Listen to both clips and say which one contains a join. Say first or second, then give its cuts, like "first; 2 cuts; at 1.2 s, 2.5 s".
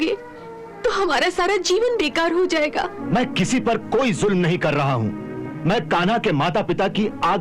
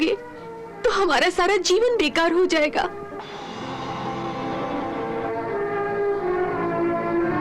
first; 1 cut; at 3.0 s